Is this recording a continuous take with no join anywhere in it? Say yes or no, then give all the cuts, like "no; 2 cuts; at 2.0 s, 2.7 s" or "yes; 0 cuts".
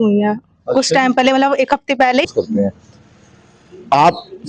no; 1 cut; at 2.2 s